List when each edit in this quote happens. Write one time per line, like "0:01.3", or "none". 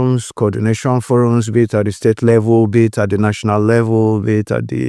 none